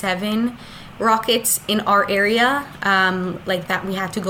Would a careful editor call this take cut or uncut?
uncut